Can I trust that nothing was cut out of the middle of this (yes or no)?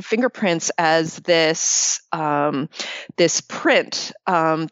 yes